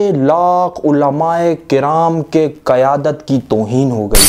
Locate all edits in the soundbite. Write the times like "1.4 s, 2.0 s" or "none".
none